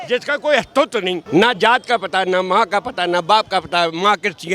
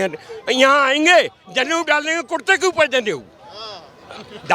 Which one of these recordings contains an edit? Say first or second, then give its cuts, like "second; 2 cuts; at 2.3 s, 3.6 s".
first; 1 cut; at 1.2 s